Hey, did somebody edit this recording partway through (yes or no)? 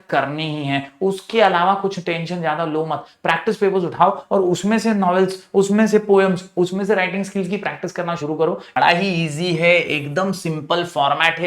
yes